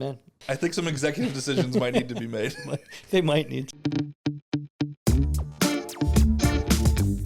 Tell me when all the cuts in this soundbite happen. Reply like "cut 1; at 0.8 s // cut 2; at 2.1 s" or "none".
cut 1; at 3.7 s